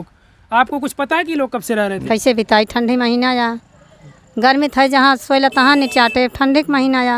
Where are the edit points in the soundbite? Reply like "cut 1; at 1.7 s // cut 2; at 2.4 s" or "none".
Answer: cut 1; at 2.0 s